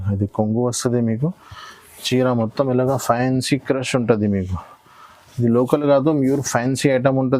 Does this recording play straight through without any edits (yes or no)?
yes